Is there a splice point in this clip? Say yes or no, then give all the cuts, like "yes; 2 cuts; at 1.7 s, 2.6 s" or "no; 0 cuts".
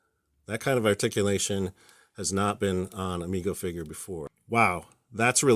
yes; 1 cut; at 4.3 s